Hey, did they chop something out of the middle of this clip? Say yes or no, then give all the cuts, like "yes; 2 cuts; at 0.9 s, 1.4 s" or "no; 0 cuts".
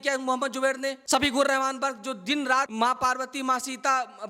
yes; 2 cuts; at 1.0 s, 2.7 s